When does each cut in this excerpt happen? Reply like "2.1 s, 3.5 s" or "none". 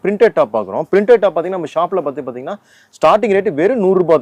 none